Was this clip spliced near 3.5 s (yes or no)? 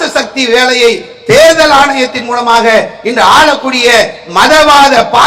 no